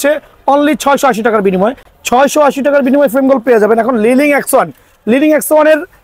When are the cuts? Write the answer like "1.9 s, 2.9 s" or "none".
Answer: none